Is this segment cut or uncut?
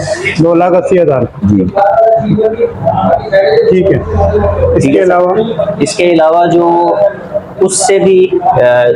uncut